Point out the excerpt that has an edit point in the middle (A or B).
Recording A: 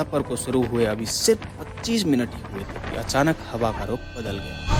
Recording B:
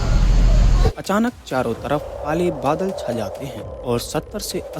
B